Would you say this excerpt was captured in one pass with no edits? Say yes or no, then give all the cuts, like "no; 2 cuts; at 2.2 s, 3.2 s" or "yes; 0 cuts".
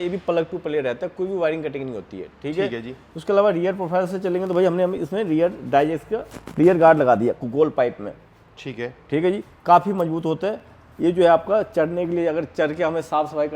yes; 0 cuts